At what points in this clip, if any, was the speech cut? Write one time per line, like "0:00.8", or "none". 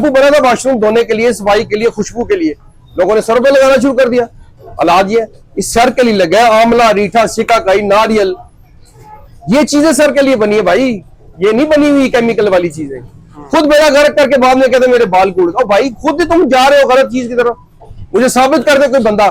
none